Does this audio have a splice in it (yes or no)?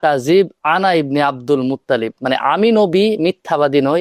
no